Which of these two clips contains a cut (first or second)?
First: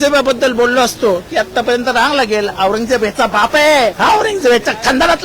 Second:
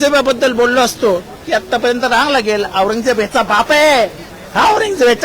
first